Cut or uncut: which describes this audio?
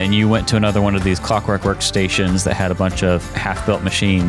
uncut